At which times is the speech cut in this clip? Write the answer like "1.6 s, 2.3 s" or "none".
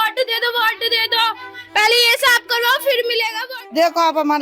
3.4 s